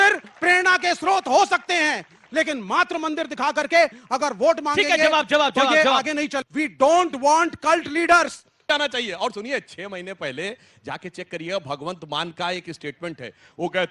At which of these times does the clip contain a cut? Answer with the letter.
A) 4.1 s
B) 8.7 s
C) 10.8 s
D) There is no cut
B